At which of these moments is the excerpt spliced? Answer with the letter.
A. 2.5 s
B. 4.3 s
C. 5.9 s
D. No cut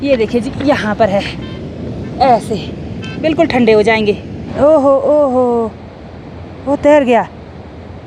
B